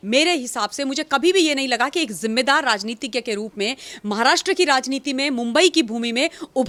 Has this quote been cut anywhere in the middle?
no; 0 cuts

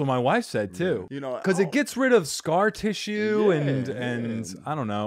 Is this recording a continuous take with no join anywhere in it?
no; 1 cut; at 1.1 s

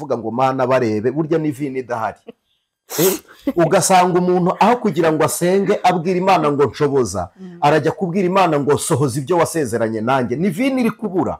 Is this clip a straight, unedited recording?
yes; 0 cuts

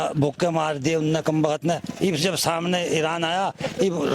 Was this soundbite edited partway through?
no; 0 cuts

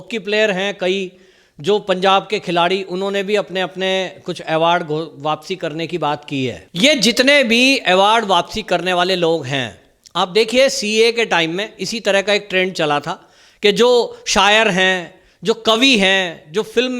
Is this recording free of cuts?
no; 1 cut; at 6.7 s

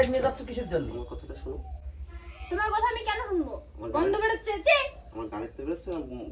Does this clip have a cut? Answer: no; 0 cuts

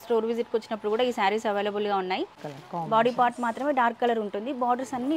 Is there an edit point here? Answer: yes; 1 cut; at 2.4 s

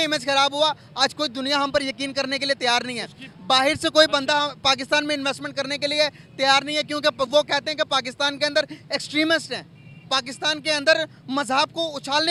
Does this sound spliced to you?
no; 0 cuts

